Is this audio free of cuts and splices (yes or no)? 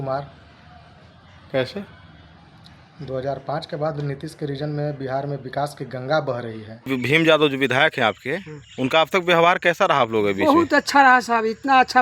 no